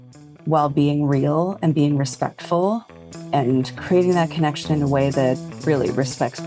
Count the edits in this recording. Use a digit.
1